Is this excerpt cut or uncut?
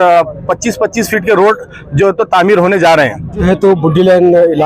cut